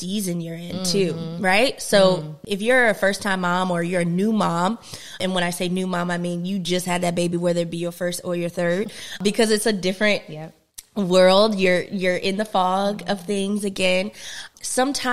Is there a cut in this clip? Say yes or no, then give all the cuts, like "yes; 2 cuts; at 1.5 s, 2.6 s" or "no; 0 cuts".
yes; 3 cuts; at 2.4 s, 5.2 s, 9.2 s